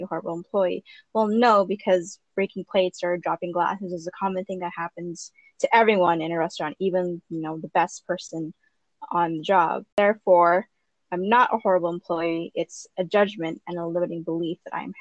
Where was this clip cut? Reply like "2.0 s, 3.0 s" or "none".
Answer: 9.9 s